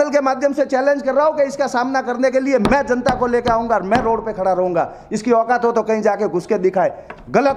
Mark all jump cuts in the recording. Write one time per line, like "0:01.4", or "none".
none